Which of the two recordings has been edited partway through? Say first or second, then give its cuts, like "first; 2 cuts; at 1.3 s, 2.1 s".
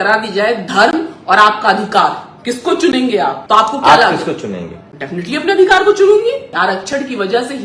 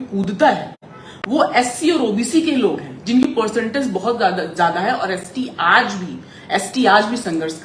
first; 2 cuts; at 3.4 s, 6.5 s